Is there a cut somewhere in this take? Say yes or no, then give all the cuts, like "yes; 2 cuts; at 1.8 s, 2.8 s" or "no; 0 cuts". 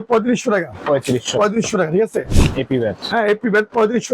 yes; 1 cut; at 2.4 s